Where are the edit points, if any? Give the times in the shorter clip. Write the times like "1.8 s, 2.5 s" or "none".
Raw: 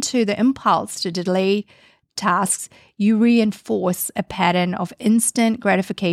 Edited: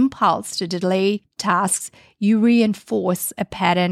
1.3 s